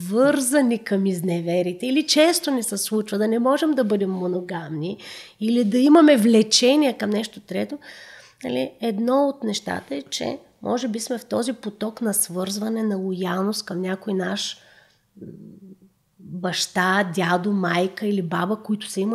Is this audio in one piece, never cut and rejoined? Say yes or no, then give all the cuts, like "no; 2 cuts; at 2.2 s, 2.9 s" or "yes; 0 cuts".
yes; 0 cuts